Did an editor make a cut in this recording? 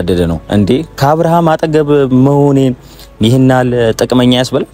no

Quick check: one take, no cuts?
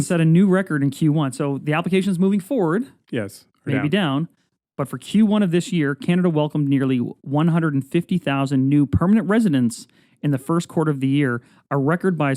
yes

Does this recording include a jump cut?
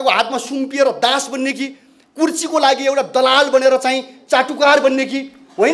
no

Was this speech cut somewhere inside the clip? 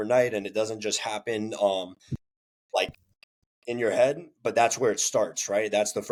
no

